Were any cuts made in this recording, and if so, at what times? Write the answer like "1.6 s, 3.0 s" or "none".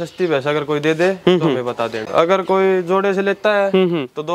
2.0 s